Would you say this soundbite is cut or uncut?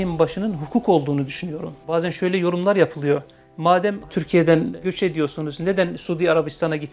cut